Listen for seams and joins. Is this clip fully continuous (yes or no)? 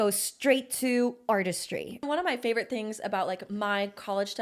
no